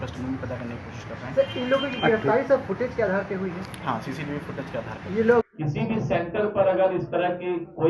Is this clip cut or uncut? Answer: cut